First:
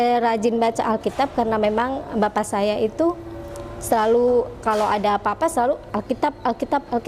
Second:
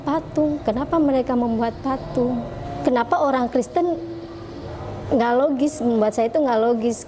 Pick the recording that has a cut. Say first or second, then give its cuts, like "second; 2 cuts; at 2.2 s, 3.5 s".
second; 1 cut; at 2.4 s